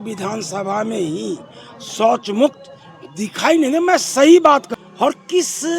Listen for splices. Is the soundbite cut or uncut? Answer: cut